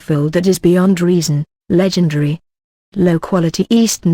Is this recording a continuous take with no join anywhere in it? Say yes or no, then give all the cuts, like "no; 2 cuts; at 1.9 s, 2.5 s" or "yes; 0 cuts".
no; 1 cut; at 0.9 s